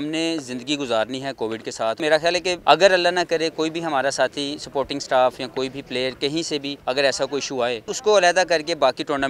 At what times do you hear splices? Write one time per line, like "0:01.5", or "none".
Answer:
0:02.3
0:06.7
0:07.9